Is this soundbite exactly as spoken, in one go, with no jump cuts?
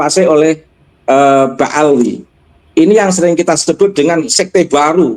no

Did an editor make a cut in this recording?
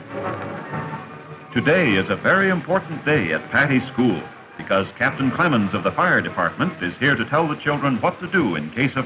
yes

